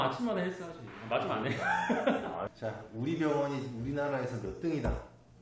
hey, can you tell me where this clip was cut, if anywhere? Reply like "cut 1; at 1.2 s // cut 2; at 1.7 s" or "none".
cut 1; at 2.5 s